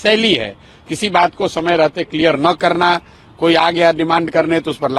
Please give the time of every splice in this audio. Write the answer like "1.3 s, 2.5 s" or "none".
none